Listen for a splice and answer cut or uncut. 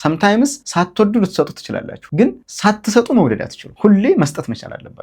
cut